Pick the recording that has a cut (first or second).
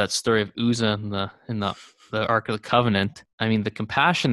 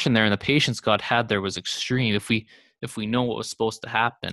first